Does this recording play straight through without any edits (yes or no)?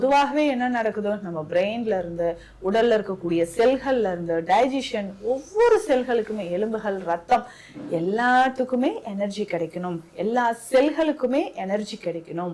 yes